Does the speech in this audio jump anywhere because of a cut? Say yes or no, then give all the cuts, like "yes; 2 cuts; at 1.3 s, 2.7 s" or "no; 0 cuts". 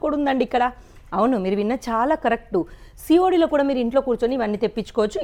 no; 0 cuts